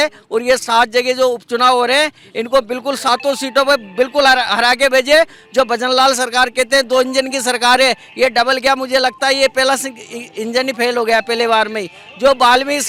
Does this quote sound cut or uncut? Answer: uncut